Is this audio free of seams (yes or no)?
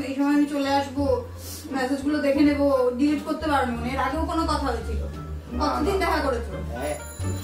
yes